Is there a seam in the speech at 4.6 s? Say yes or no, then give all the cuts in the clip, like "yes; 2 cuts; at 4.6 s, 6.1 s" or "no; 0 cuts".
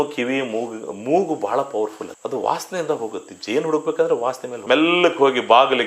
yes; 1 cut; at 4.6 s